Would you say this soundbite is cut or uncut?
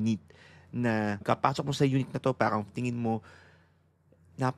cut